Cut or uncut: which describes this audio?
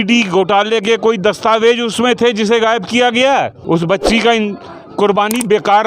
cut